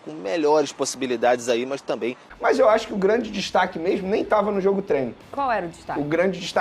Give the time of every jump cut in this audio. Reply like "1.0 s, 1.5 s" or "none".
2.3 s

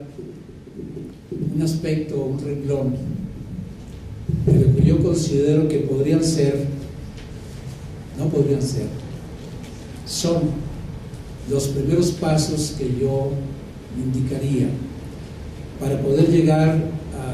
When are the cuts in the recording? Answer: none

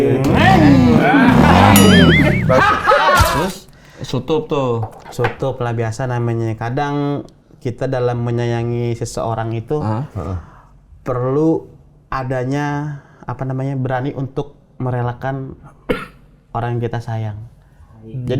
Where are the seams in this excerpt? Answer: 3.3 s

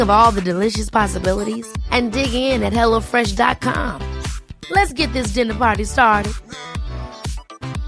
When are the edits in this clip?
none

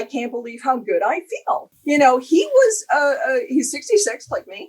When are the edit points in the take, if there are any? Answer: 1.7 s

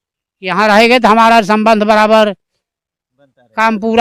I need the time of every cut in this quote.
none

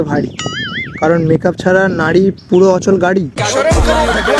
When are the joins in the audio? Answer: none

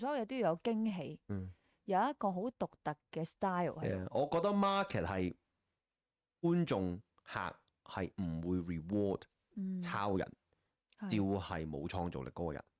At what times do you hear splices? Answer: none

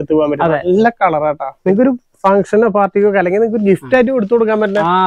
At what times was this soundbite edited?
1.5 s

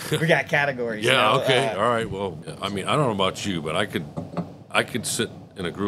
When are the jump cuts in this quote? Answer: 2.4 s

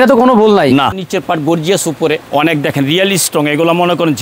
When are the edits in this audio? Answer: 1.0 s, 2.2 s

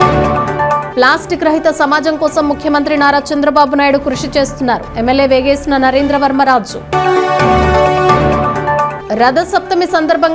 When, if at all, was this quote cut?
none

